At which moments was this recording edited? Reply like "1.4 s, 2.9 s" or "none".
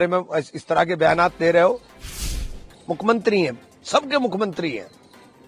2.2 s